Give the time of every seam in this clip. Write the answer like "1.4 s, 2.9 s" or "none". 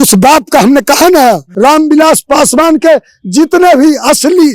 1.5 s